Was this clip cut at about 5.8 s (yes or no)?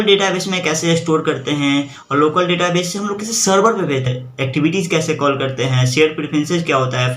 no